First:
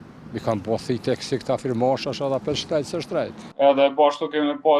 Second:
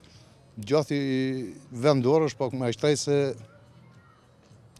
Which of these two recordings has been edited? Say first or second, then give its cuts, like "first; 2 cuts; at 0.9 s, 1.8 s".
first; 1 cut; at 3.5 s